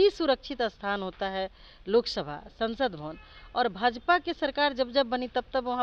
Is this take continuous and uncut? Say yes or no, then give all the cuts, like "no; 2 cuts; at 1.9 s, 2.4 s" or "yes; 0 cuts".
yes; 0 cuts